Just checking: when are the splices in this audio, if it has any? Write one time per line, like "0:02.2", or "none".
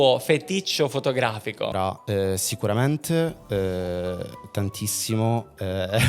0:01.7